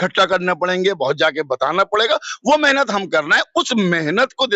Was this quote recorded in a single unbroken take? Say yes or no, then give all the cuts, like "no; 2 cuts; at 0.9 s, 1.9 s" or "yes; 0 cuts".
yes; 0 cuts